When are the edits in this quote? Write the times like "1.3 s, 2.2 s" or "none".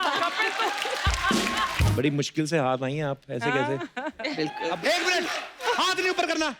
1.9 s, 4.8 s